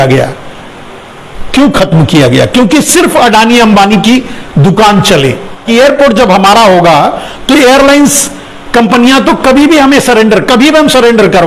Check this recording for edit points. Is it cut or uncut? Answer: cut